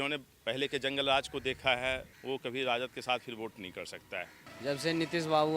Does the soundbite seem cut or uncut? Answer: cut